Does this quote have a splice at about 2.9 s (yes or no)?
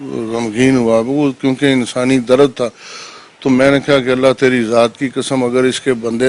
no